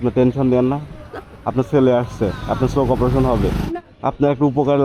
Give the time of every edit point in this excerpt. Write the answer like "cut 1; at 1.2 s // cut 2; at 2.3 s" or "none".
cut 1; at 3.6 s